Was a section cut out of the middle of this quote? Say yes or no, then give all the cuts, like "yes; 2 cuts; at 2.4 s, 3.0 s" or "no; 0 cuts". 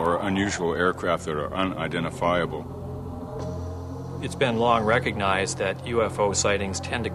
no; 0 cuts